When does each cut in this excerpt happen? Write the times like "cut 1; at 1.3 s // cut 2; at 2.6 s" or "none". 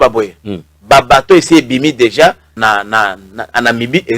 cut 1; at 2.5 s